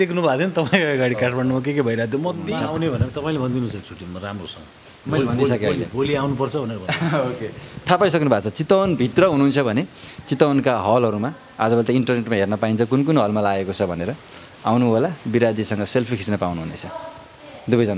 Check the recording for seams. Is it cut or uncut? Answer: cut